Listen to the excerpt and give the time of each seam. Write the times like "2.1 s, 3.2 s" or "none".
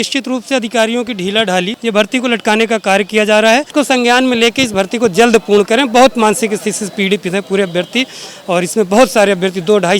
1.8 s, 3.7 s